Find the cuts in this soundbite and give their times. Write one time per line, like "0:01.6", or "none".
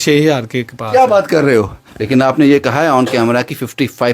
0:01.8